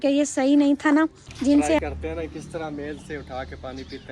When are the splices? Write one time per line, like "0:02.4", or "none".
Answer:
0:01.8